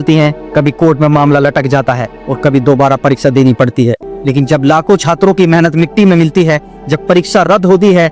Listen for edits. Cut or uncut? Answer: cut